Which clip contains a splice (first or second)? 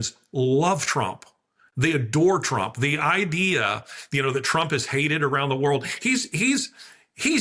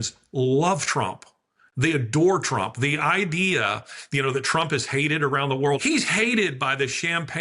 second